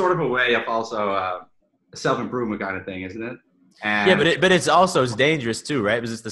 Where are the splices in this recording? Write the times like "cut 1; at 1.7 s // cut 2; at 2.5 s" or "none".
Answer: none